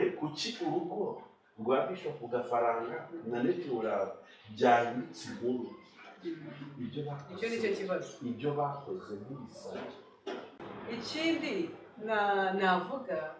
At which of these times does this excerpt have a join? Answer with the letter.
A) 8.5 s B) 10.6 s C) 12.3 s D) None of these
B